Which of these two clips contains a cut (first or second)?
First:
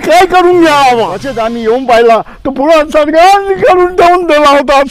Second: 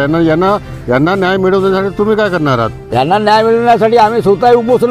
first